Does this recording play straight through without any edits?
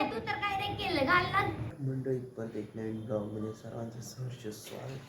no; 1 cut; at 1.7 s

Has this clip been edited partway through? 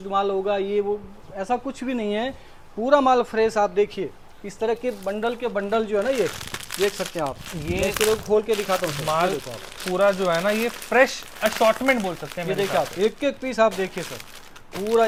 no; 0 cuts

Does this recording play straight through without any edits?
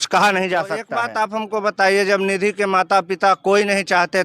no; 1 cut; at 1.0 s

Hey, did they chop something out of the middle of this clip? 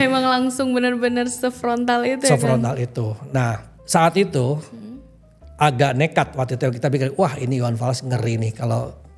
no; 0 cuts

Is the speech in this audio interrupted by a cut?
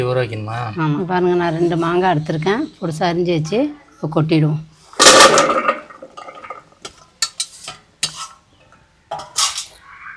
yes; 1 cut; at 1.0 s

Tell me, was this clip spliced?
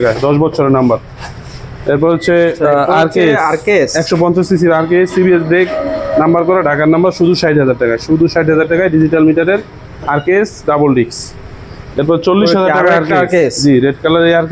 no; 0 cuts

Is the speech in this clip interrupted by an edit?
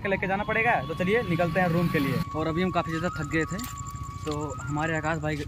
yes; 1 cut; at 2.3 s

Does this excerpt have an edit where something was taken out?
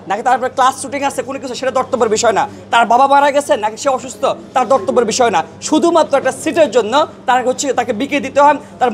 no; 0 cuts

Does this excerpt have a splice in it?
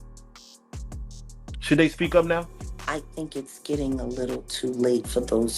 yes; 1 cut; at 1.0 s

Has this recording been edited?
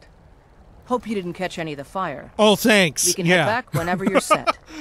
no; 0 cuts

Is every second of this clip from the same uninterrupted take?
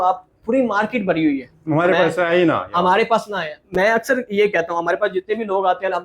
yes; 0 cuts

